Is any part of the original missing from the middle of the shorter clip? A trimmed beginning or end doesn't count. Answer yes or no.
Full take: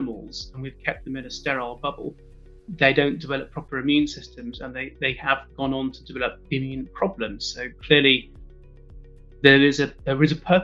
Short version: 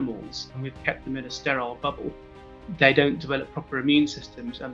no